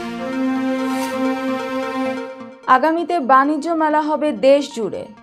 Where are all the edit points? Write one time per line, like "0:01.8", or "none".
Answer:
0:02.3